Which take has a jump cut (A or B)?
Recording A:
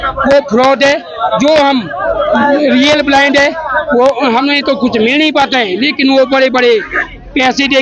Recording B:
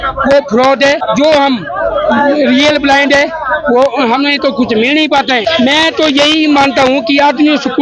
B